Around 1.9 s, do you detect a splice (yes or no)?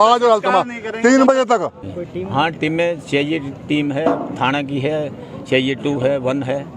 yes